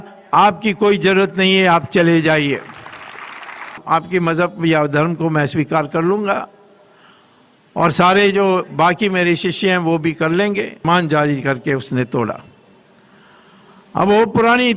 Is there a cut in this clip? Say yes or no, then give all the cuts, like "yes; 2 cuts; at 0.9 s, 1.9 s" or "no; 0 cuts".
yes; 2 cuts; at 3.8 s, 10.8 s